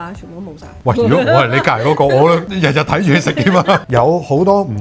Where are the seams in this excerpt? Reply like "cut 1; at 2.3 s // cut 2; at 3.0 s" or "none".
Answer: cut 1; at 3.8 s